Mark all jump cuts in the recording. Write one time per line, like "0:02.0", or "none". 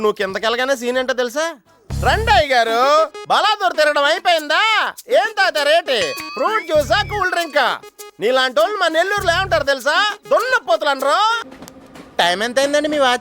0:11.4

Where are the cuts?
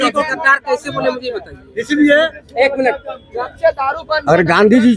none

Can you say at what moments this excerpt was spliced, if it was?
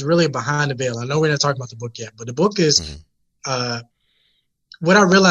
none

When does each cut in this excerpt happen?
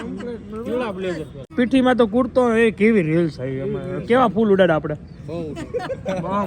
0:01.4

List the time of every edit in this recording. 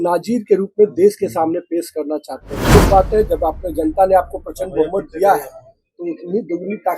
0:02.7

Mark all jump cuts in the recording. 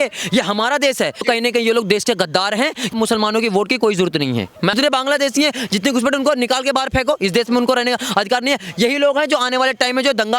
0:01.2
0:02.9
0:04.7

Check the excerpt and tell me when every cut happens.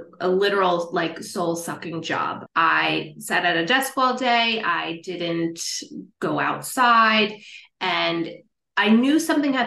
none

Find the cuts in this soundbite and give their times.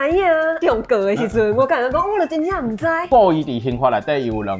0:03.0

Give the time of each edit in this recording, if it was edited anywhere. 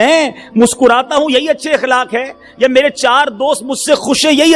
none

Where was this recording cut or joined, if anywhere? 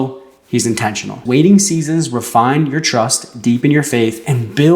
0:01.2

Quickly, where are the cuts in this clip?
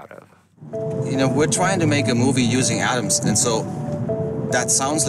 none

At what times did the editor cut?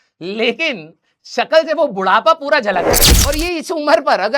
0:03.0

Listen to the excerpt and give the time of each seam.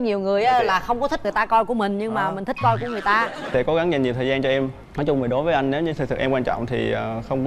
0:03.5

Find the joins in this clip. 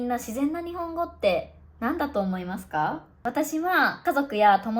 0:03.1
0:04.0

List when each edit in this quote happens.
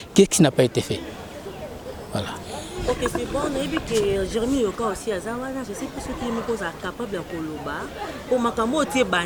none

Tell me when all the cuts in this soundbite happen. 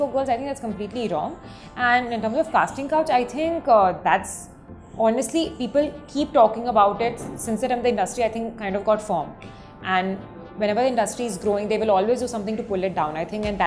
none

